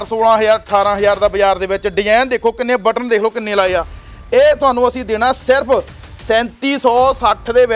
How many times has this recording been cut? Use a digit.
0